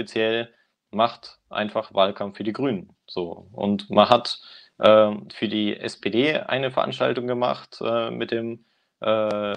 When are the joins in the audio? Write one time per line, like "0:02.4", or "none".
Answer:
none